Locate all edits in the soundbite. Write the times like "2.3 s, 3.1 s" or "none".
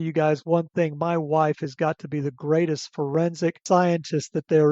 3.6 s